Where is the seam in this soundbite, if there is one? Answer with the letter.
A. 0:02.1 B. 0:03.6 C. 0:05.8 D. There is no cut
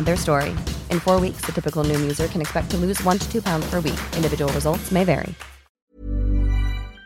C